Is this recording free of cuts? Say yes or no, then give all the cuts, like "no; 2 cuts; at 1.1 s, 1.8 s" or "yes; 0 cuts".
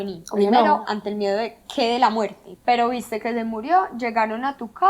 no; 1 cut; at 2.5 s